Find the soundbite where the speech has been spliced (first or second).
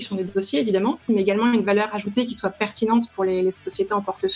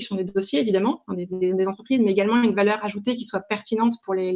first